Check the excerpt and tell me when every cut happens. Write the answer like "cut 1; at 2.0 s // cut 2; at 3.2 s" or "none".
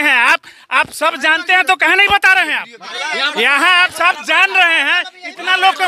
cut 1; at 2.9 s